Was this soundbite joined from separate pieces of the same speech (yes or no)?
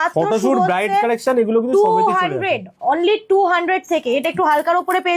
no